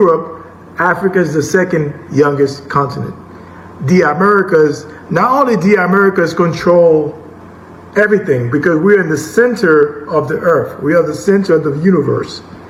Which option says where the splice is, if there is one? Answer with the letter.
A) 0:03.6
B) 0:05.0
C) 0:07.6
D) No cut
D